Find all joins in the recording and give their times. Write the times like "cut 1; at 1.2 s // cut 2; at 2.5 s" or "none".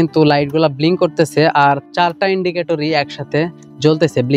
none